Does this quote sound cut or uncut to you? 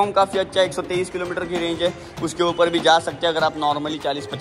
uncut